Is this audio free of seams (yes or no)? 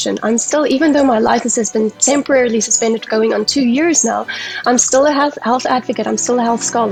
yes